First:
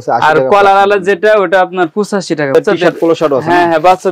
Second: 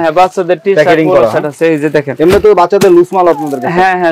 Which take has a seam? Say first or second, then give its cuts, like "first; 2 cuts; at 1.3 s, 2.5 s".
first; 1 cut; at 2.5 s